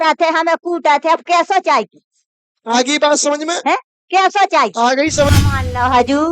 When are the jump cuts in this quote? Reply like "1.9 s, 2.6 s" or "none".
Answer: 5.3 s